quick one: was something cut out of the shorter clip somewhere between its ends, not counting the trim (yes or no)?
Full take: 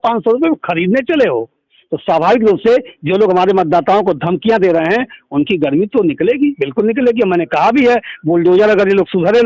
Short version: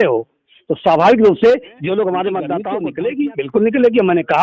yes